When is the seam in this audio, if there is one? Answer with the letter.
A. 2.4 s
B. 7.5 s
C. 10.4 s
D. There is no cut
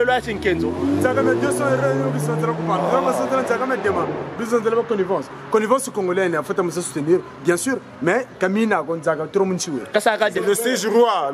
C